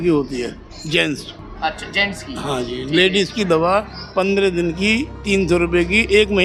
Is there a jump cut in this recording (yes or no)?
no